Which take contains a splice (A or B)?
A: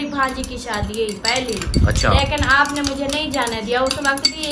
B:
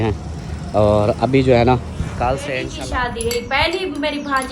B